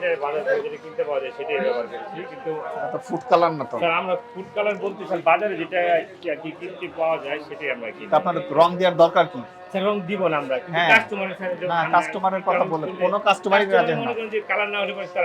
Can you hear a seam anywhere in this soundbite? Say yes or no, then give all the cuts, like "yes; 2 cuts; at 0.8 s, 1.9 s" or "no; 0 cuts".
no; 0 cuts